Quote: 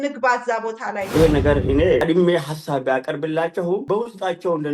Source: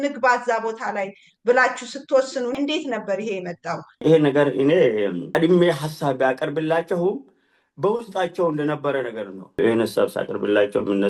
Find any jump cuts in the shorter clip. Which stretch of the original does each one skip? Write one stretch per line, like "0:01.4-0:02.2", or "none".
0:01.1-0:04.0
0:04.9-0:05.3
0:07.2-0:07.8